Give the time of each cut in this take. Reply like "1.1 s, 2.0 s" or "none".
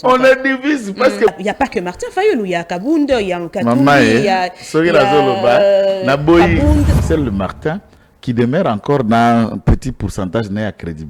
1.4 s, 7.0 s